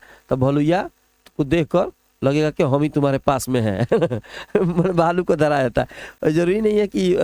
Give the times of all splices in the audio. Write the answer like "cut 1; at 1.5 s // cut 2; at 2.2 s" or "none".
none